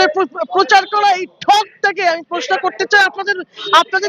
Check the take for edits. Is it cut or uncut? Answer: uncut